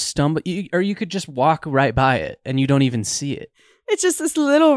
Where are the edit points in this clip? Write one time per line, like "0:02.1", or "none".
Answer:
0:03.8

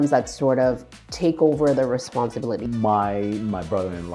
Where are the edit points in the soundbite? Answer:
0:02.6

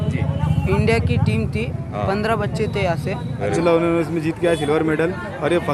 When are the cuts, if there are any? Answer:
0:03.5

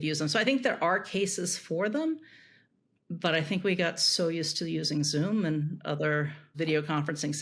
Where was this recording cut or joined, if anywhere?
none

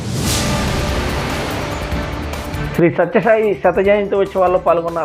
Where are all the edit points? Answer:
0:02.7

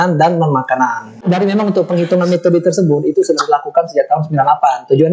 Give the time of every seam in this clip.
0:01.2

